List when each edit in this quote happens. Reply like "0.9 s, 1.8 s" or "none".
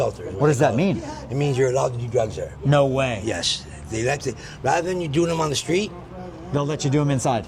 none